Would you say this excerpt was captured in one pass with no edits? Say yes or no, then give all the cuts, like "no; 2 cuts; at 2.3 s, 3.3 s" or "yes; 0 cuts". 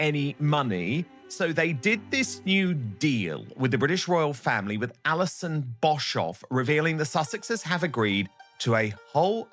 yes; 0 cuts